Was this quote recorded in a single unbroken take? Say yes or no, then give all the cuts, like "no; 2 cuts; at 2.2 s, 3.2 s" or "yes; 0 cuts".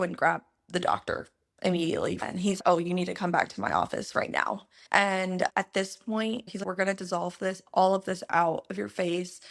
no; 2 cuts; at 2.3 s, 5.5 s